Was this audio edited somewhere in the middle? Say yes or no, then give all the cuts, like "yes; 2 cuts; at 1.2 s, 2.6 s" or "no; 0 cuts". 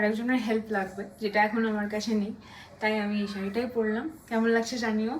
no; 0 cuts